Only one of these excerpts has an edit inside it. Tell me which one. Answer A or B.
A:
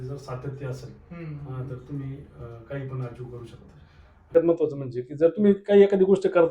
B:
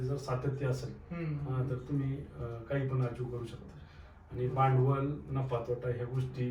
A